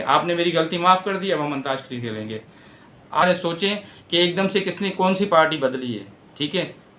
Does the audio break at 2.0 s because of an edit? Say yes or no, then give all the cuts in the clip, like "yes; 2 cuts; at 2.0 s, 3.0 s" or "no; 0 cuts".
no; 1 cut; at 3.2 s